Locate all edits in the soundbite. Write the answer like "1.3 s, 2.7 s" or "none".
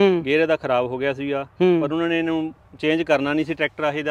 none

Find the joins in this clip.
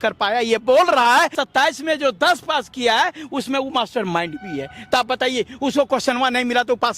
1.4 s

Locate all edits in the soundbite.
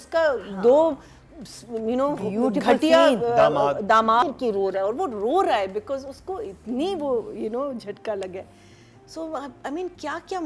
4.2 s

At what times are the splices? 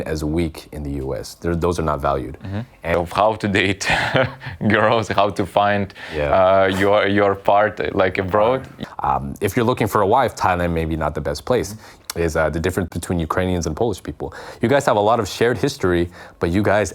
2.9 s, 8.7 s, 12.0 s

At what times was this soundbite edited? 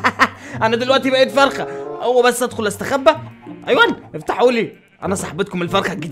none

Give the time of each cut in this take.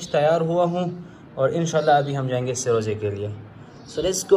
none

